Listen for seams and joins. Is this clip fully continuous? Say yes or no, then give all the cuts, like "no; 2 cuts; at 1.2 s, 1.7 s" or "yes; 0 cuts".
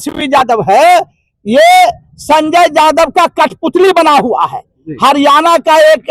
yes; 0 cuts